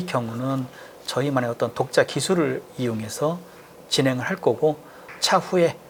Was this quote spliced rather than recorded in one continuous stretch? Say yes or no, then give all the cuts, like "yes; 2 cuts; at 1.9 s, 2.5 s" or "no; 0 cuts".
no; 0 cuts